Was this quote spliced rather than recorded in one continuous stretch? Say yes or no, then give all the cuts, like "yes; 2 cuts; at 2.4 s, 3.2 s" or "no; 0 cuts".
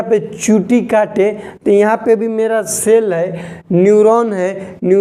no; 0 cuts